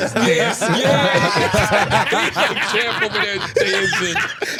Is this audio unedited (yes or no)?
yes